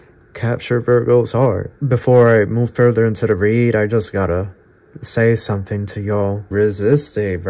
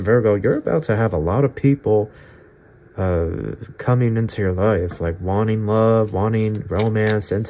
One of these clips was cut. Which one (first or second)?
first